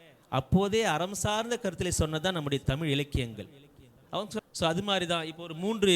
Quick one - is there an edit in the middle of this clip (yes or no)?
yes